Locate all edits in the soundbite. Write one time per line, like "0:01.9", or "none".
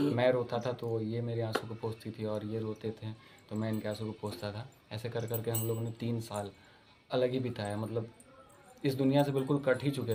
none